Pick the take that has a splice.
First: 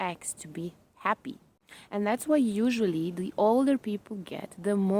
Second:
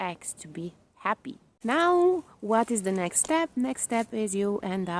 second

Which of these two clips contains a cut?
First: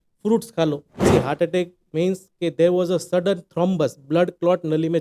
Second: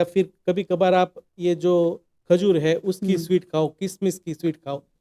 first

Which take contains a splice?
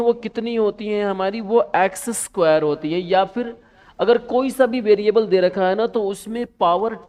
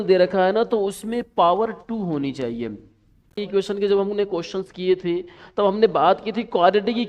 second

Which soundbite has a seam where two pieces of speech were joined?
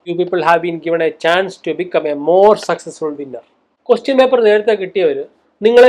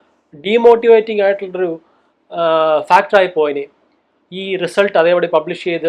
first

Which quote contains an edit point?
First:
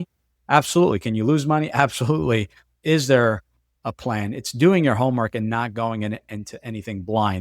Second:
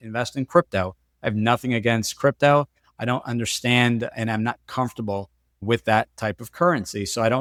first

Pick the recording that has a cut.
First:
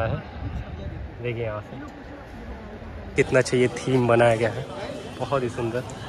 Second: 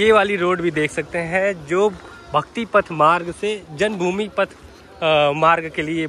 first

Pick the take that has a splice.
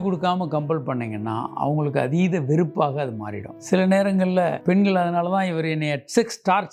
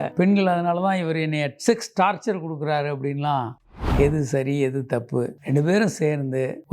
second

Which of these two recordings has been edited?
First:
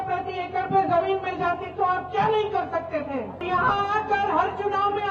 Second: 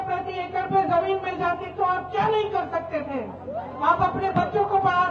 first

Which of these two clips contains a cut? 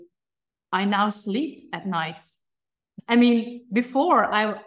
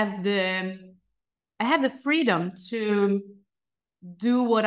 first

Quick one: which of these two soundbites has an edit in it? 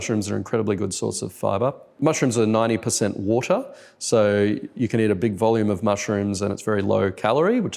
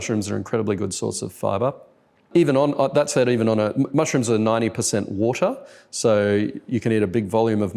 first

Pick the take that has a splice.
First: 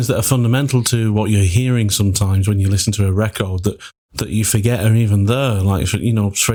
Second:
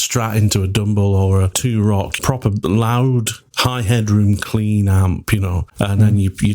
second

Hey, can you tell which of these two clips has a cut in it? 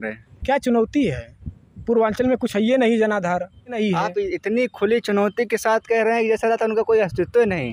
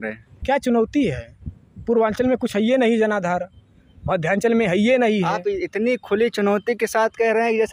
first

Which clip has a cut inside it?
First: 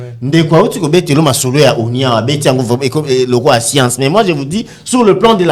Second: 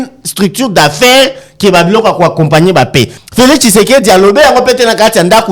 second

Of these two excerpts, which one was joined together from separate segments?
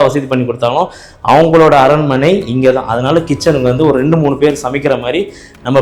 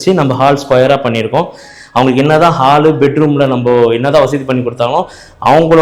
second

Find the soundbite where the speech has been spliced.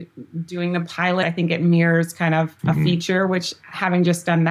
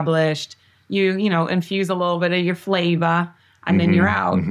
first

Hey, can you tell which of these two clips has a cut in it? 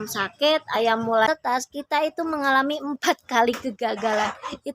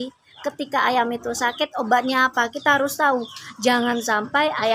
first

